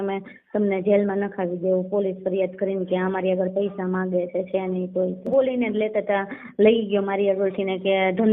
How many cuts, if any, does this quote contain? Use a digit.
1